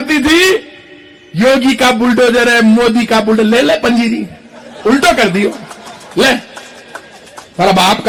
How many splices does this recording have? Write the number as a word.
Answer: zero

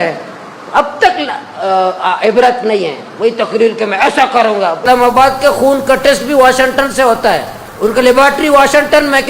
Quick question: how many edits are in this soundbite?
one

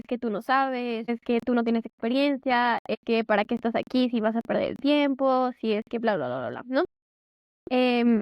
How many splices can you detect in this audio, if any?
two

